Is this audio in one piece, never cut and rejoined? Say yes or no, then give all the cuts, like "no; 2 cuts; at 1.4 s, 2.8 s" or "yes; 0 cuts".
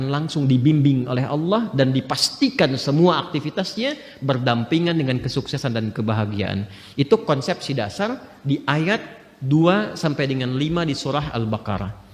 yes; 0 cuts